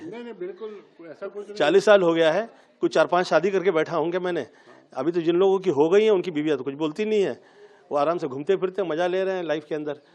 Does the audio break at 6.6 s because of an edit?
no; 0 cuts

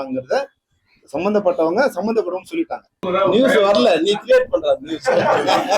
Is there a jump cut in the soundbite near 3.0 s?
yes; 1 cut; at 3.0 s

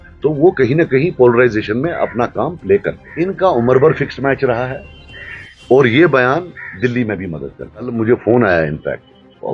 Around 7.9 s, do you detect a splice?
yes; 2 cuts; at 3.0 s, 7.9 s

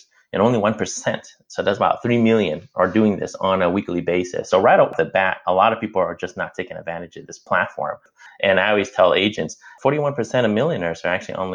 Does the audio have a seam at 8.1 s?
yes; 1 cut; at 8.1 s

